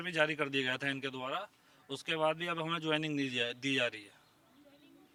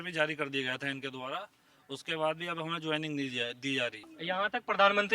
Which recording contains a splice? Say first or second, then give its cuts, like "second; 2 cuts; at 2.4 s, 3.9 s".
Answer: second; 1 cut; at 4.2 s